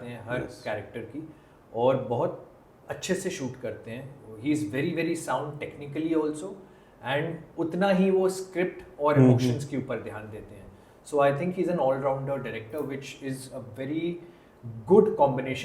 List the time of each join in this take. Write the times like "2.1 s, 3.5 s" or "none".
none

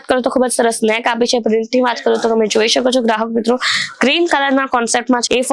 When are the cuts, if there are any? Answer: none

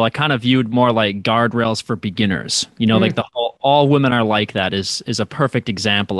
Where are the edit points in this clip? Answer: none

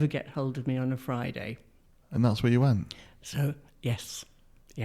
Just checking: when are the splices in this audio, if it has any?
none

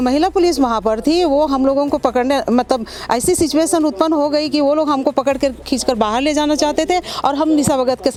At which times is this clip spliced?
none

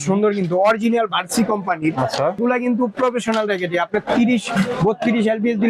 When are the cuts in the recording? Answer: 2.4 s

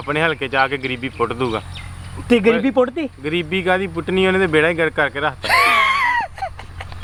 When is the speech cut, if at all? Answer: none

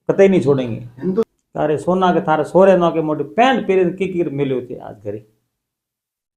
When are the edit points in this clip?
1.4 s

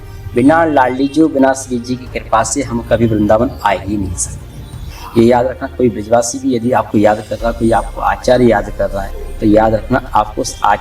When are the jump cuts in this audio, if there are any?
5.0 s, 9.2 s

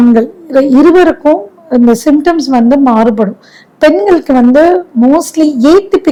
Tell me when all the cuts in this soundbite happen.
none

